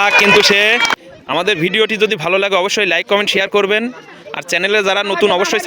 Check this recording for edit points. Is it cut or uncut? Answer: cut